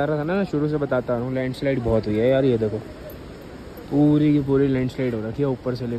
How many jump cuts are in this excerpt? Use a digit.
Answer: 0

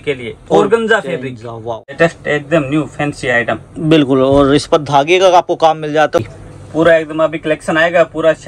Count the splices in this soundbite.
2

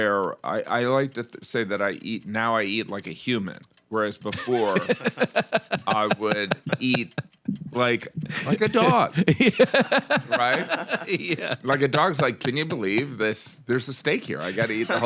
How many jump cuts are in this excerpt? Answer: 0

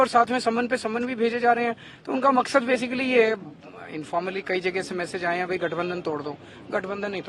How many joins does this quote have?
0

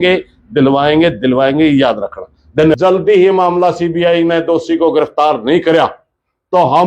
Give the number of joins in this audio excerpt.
1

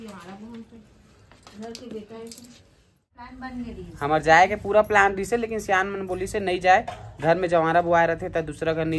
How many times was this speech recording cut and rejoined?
1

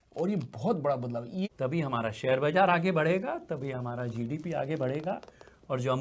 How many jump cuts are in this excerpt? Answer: 1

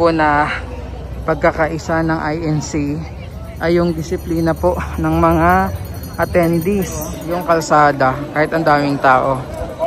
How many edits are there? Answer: 1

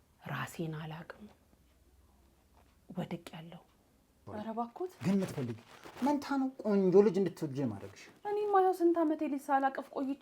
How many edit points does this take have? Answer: 1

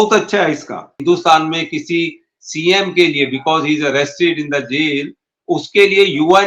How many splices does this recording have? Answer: 1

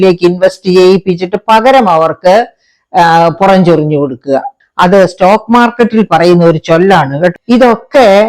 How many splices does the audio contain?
2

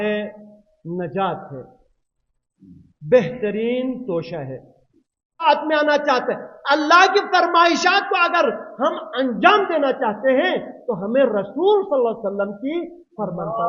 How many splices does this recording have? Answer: 1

